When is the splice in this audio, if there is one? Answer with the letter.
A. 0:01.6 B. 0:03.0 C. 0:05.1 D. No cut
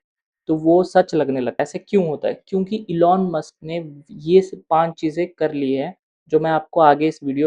A